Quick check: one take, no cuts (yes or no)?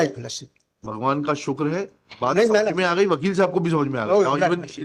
yes